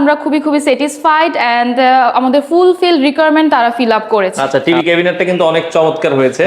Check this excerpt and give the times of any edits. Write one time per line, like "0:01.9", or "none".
0:04.6